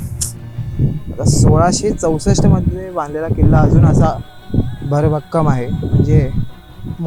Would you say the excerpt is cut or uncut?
uncut